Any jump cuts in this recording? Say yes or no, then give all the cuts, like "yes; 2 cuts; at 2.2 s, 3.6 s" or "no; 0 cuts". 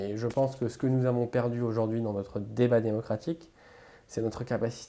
no; 0 cuts